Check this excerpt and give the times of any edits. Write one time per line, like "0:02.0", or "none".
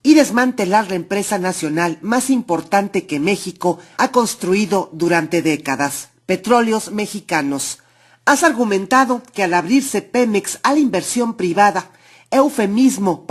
0:10.5